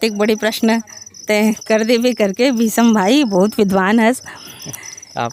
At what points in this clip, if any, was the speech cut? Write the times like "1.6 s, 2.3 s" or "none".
none

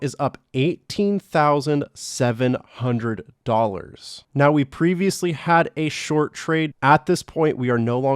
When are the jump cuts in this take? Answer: 6.7 s

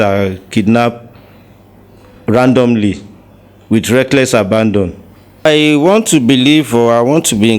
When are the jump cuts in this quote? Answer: 5.5 s

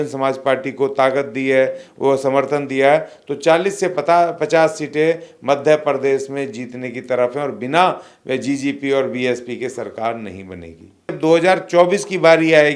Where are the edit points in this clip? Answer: 11.1 s

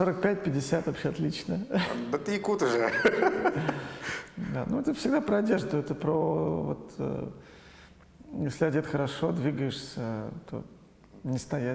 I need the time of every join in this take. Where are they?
none

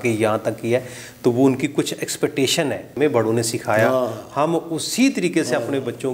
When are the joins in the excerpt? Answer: 2.9 s

